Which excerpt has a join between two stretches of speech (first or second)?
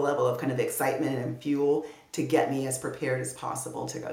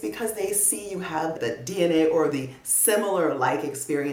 second